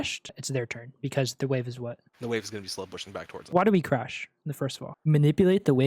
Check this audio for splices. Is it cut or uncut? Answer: cut